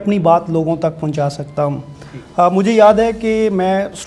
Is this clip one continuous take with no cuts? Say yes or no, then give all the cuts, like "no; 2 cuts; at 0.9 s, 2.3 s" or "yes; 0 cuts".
yes; 0 cuts